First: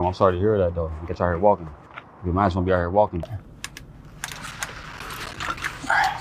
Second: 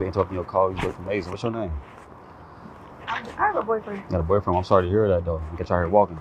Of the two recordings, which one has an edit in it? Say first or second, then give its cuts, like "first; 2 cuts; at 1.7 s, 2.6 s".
first; 1 cut; at 3.4 s